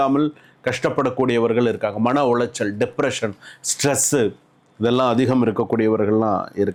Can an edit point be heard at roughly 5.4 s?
no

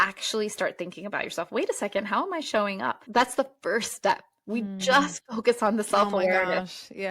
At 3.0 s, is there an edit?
yes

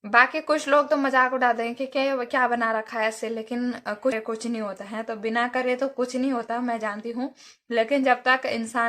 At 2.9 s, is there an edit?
no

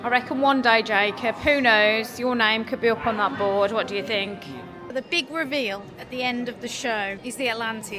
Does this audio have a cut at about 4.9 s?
yes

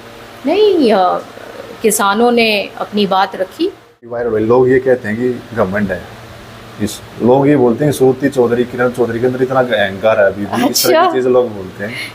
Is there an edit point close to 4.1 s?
yes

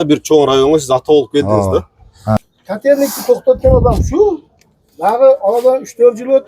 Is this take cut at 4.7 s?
no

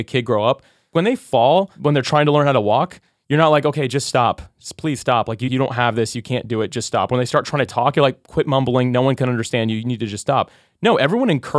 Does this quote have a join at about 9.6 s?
no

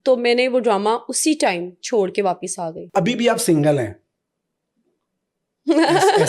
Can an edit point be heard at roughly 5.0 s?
no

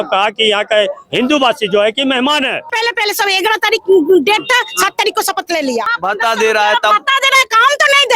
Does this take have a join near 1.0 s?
no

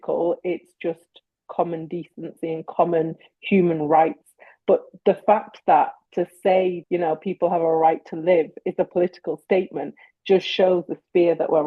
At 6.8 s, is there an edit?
yes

